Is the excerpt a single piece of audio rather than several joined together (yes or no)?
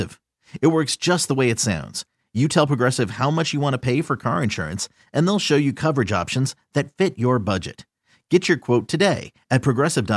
yes